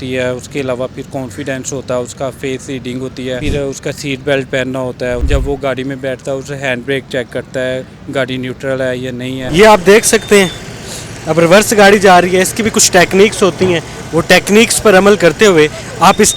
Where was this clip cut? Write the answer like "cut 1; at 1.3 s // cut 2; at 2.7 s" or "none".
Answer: cut 1; at 3.4 s // cut 2; at 5.2 s // cut 3; at 9.5 s